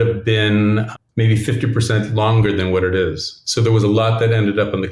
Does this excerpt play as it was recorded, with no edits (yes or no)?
no